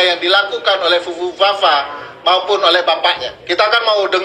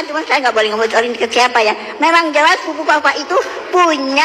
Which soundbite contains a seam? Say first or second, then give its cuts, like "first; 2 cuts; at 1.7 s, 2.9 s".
first; 1 cut; at 3.3 s